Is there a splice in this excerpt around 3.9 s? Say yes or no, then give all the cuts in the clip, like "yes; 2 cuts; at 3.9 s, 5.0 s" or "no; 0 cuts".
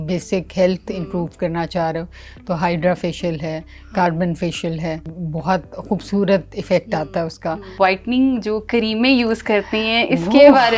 no; 2 cuts; at 5.1 s, 7.7 s